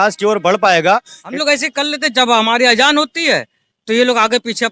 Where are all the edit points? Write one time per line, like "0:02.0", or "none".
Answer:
0:01.2